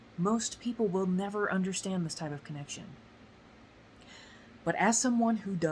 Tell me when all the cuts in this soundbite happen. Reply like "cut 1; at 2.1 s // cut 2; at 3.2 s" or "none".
none